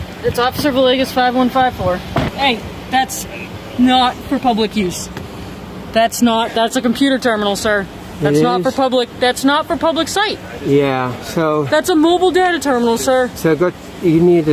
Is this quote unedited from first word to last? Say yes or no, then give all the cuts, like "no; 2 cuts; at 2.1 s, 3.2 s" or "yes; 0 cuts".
no; 1 cut; at 2.3 s